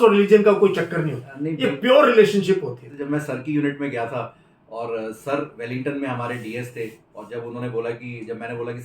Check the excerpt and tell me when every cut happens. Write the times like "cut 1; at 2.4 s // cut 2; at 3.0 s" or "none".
cut 1; at 3.0 s